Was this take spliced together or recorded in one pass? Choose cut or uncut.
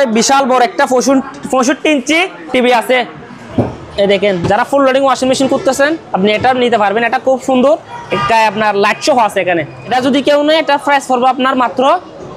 cut